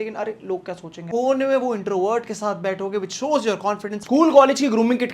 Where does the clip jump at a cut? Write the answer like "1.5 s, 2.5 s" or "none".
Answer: 1.1 s, 4.0 s